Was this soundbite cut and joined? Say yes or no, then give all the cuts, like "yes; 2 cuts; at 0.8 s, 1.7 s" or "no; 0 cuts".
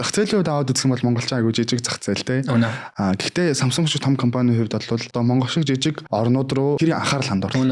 yes; 2 cuts; at 2.9 s, 5.1 s